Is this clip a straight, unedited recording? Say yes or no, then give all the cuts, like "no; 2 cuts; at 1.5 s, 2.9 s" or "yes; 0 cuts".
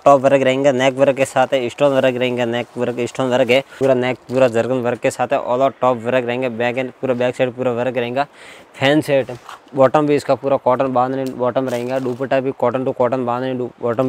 no; 2 cuts; at 3.7 s, 9.3 s